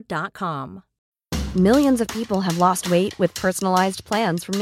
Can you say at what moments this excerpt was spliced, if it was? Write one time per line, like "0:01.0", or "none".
0:01.0